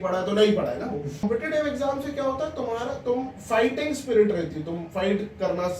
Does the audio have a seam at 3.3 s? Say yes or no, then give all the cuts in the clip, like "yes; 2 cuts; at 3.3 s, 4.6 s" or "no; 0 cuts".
no; 1 cut; at 1.2 s